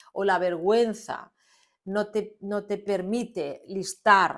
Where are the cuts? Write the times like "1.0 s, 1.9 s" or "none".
none